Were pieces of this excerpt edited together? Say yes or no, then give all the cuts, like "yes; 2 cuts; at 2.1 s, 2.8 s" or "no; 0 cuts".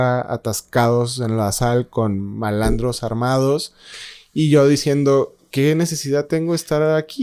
no; 0 cuts